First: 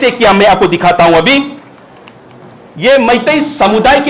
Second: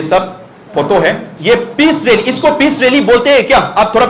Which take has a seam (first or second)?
second